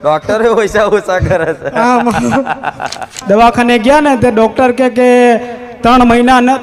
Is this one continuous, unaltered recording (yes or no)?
no